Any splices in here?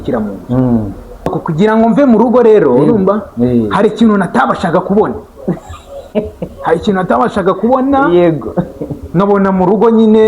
yes; 1 cut; at 1.3 s

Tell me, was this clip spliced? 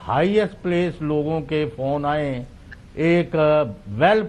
no; 0 cuts

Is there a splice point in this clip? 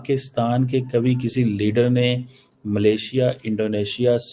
no; 0 cuts

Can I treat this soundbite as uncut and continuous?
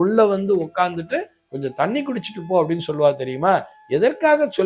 yes; 0 cuts

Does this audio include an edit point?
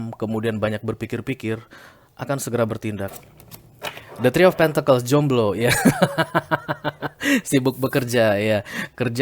yes; 1 cut; at 3.2 s

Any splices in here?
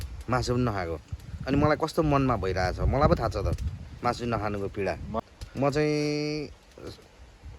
yes; 1 cut; at 5.2 s

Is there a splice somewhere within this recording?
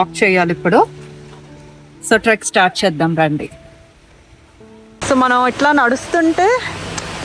no; 0 cuts

